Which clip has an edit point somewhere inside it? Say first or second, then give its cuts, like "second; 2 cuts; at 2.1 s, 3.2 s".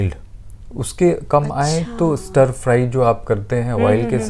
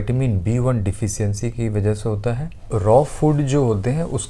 second; 1 cut; at 2.7 s